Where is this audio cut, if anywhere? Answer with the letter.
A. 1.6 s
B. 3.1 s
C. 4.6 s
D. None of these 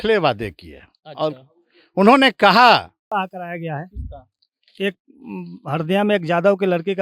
B